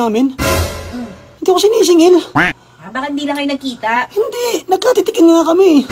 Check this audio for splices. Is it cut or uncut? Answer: uncut